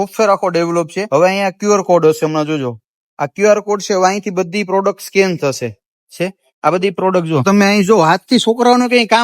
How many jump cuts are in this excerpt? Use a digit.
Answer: 2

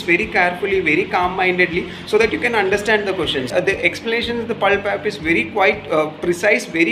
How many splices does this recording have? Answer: 1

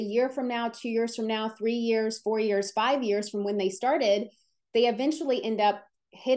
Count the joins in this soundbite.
0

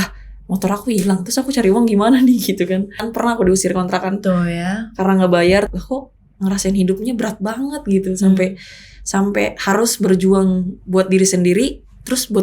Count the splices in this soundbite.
2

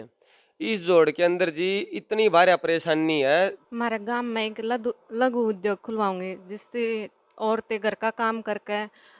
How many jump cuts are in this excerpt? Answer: 1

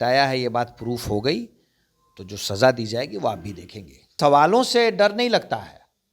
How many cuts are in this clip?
1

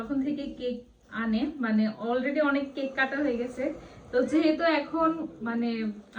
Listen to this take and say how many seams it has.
0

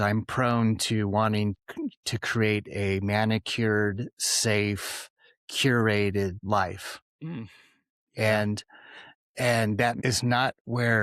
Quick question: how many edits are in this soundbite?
3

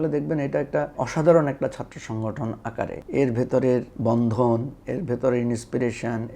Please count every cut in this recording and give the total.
3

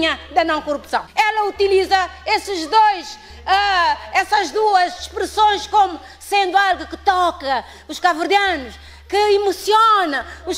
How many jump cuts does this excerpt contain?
1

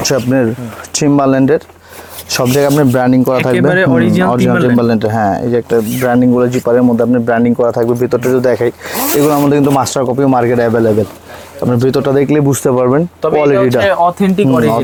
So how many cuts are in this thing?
0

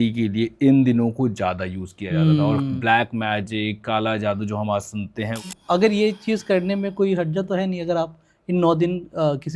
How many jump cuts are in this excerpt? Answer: 1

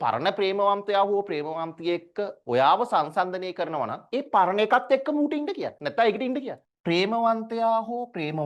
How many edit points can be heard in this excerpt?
1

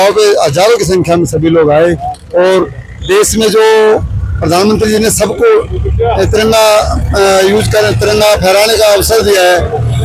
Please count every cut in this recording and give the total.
0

